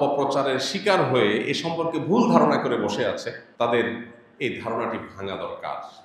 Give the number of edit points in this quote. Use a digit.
1